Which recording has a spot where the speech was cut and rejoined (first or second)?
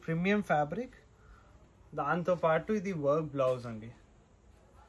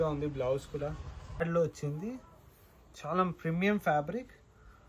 second